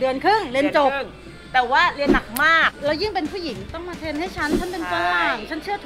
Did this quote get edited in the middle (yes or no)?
yes